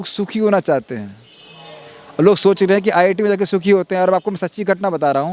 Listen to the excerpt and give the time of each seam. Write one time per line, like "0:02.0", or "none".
none